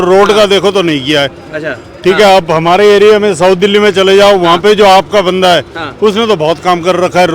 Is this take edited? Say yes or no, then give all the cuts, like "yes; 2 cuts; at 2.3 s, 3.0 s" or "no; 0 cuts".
no; 0 cuts